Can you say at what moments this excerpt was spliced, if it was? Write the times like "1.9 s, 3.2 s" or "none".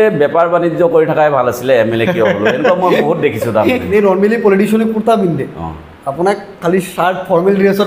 3.9 s

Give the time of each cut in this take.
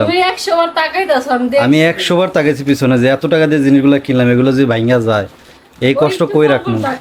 none

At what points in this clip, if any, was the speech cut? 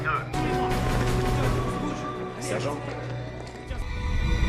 none

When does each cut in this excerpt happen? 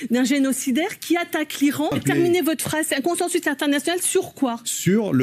2.0 s

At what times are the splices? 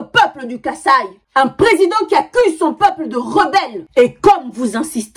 1.2 s, 3.8 s

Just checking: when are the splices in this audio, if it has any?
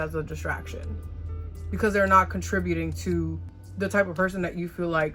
none

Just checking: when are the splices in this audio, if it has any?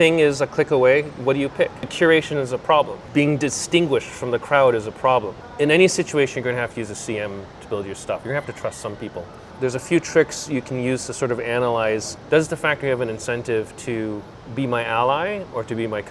1.9 s, 3.0 s, 5.4 s, 8.2 s, 9.5 s

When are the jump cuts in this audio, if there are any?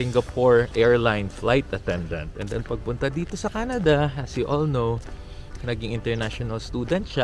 none

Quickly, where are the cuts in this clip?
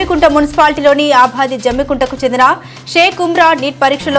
none

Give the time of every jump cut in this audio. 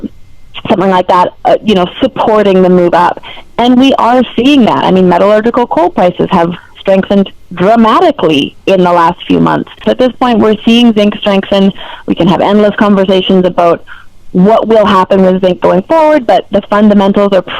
9.8 s

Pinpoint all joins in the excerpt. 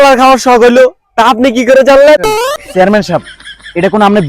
2.6 s

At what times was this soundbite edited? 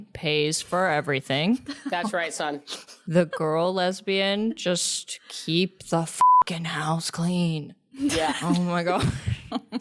none

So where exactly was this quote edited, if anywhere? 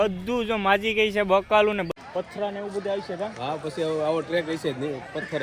1.9 s

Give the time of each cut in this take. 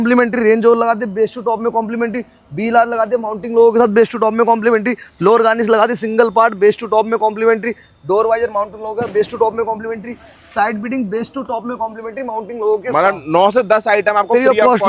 none

